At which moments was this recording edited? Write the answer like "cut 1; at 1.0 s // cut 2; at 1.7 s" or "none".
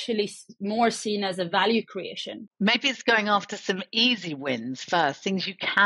cut 1; at 2.5 s